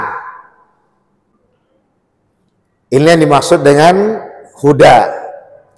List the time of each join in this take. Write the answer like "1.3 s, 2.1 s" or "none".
none

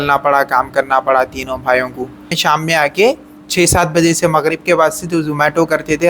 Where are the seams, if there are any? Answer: 2.3 s

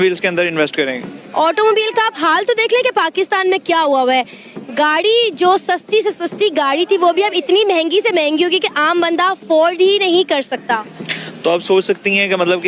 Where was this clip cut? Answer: none

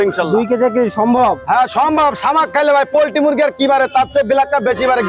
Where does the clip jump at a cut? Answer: none

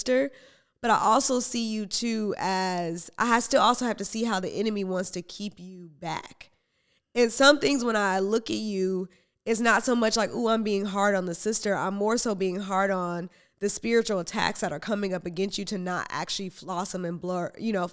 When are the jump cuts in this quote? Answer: none

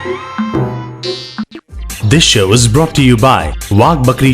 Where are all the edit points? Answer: 1.4 s

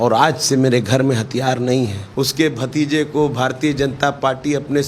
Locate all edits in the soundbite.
2.0 s

